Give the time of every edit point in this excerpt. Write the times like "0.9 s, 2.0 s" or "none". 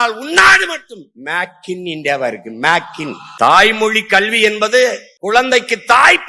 none